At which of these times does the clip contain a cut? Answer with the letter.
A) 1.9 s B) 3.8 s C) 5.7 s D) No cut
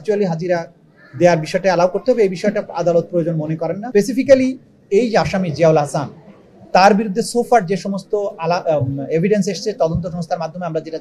B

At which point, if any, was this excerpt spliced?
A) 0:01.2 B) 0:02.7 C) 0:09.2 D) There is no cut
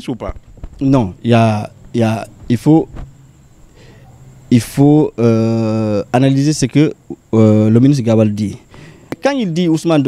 C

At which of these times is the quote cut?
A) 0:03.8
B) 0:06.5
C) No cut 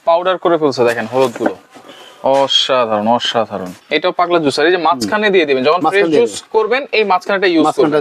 A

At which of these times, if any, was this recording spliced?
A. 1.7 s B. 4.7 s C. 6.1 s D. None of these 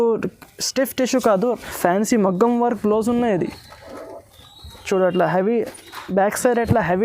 A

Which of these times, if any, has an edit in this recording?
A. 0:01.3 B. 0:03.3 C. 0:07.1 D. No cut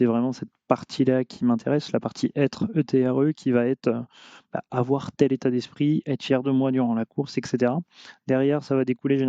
D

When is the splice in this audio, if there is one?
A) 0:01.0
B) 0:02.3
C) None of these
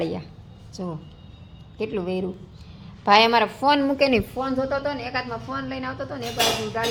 C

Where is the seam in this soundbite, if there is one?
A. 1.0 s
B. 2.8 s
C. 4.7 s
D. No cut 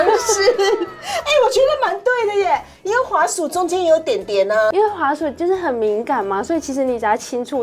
C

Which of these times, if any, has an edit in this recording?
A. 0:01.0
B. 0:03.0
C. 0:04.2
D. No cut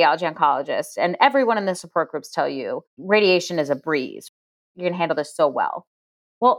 C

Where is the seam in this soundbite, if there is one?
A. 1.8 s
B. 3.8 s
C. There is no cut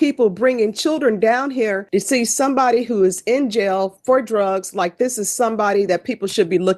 A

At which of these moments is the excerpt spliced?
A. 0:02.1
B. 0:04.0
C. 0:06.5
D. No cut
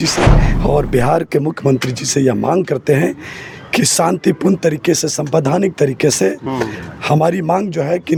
D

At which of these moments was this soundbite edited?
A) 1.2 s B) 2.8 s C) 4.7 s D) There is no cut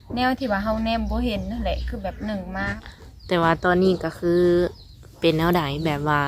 B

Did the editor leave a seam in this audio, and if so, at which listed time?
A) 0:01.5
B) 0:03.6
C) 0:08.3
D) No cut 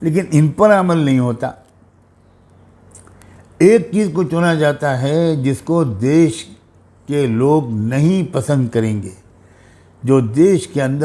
D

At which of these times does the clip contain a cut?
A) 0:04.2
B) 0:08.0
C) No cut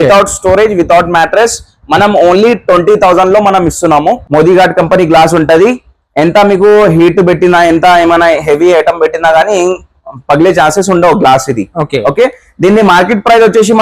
A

